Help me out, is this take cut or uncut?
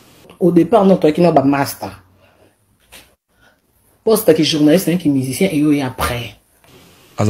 uncut